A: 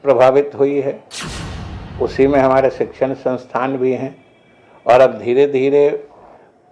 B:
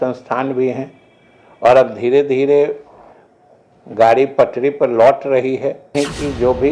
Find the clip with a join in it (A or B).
B